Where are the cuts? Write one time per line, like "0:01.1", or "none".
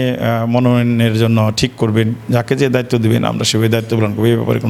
none